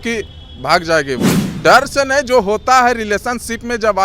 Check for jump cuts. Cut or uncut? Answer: cut